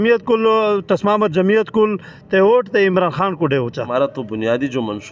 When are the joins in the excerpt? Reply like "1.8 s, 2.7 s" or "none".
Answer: 3.8 s